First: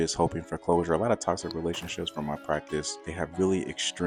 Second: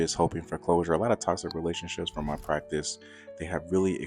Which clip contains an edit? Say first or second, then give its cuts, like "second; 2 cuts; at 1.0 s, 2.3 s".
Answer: first; 1 cut; at 3.0 s